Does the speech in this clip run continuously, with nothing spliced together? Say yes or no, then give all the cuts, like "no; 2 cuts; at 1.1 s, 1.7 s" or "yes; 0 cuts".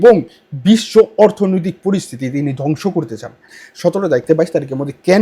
no; 1 cut; at 3.6 s